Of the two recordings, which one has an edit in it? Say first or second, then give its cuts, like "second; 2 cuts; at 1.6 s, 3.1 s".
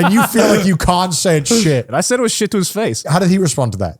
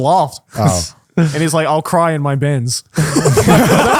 first; 2 cuts; at 1.9 s, 3.1 s